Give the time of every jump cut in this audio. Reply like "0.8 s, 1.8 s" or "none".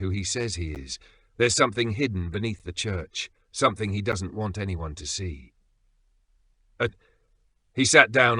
7.0 s

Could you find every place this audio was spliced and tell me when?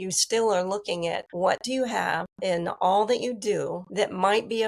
1.3 s, 2.3 s, 3.8 s

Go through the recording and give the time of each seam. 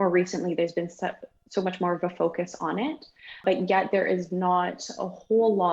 3.4 s

